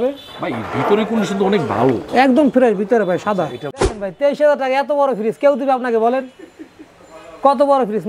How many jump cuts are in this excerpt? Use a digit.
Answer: 1